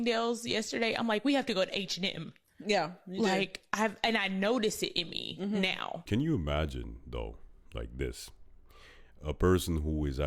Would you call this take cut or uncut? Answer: cut